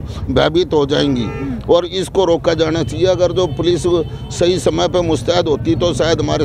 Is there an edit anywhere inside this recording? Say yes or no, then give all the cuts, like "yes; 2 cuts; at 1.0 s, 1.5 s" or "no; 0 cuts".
no; 0 cuts